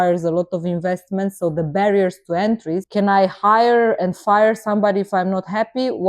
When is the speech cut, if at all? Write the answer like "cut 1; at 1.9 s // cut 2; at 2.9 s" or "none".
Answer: cut 1; at 2.9 s